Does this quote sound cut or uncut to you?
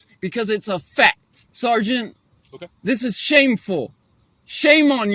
uncut